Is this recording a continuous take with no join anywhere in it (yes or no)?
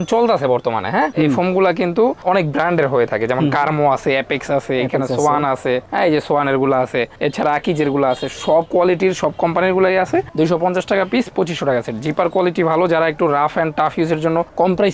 no